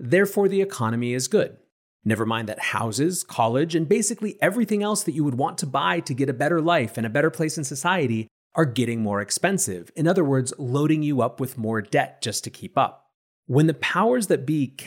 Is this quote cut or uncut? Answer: uncut